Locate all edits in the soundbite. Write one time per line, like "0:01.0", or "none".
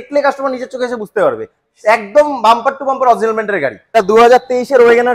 0:03.9